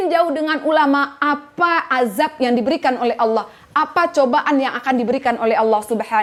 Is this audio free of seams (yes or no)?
yes